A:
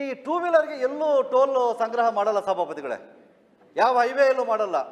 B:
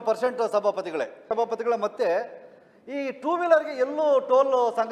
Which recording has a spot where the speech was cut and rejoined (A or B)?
B